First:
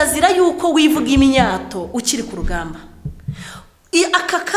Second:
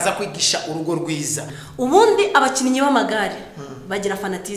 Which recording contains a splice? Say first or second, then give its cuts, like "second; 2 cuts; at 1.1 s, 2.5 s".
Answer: second; 1 cut; at 1.5 s